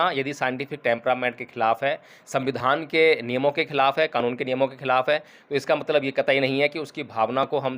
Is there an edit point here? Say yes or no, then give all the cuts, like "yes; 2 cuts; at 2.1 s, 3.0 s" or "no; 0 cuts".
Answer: no; 0 cuts